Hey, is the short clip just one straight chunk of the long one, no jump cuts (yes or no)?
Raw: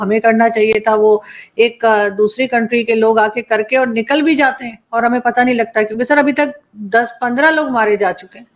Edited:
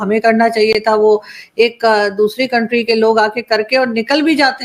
yes